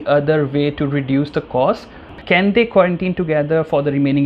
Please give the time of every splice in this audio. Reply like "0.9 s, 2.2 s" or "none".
2.1 s